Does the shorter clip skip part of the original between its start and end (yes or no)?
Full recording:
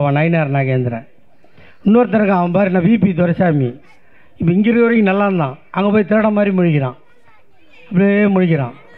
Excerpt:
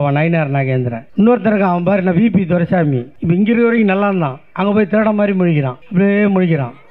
yes